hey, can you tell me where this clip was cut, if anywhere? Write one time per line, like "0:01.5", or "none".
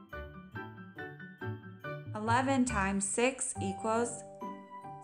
0:02.0